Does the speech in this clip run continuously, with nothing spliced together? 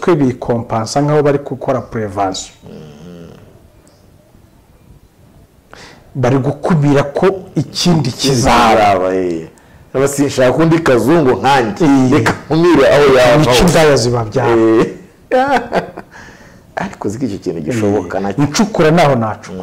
yes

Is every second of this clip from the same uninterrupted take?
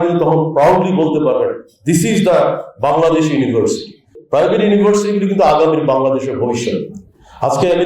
no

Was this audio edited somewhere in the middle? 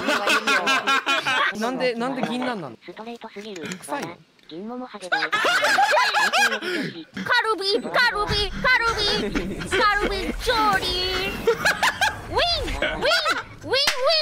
yes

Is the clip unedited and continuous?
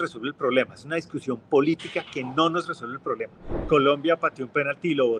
no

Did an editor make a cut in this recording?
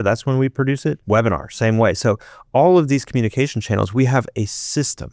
yes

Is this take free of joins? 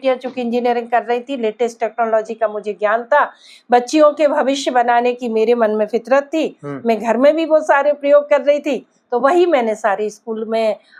yes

